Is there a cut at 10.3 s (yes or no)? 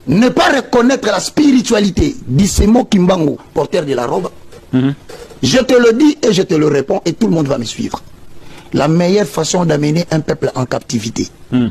no